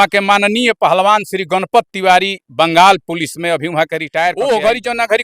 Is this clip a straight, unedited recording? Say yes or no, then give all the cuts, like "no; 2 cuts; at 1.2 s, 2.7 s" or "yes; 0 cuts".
no; 1 cut; at 4.3 s